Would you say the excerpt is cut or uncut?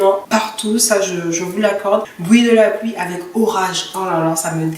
cut